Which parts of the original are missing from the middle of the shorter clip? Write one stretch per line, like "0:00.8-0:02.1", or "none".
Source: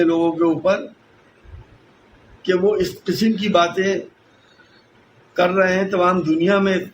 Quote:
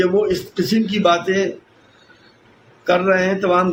none